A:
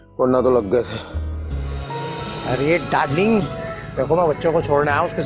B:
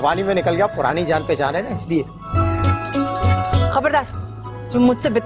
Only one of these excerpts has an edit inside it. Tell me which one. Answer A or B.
A